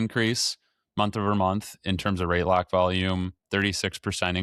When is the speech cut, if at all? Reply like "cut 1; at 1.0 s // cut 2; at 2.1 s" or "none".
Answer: none